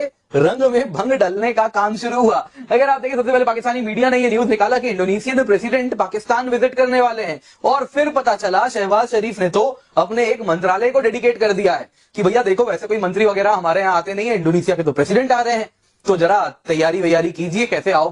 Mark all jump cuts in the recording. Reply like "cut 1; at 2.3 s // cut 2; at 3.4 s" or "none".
none